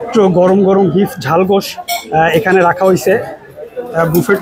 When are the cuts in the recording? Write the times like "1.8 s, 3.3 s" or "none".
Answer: none